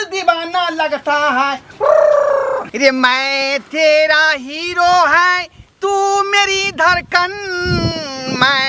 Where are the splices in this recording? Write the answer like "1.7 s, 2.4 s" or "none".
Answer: 2.7 s